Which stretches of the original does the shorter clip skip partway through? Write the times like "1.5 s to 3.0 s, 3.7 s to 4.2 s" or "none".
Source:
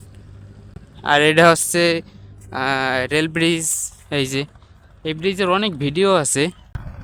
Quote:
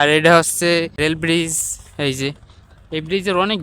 2.1 s to 3.1 s